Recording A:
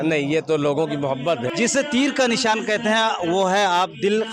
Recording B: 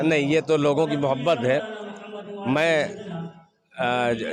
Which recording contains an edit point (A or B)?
A